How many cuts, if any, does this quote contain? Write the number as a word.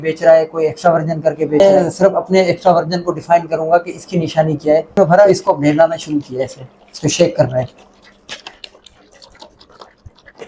three